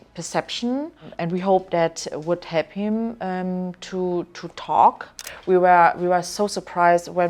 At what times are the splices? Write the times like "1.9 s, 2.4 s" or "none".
1.0 s, 5.3 s